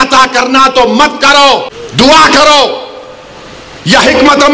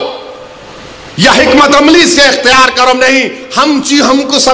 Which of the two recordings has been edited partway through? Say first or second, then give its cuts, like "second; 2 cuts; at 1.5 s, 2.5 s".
first; 1 cut; at 1.8 s